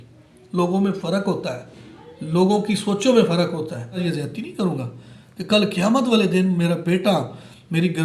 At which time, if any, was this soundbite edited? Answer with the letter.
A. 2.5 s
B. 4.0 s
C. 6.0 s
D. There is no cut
B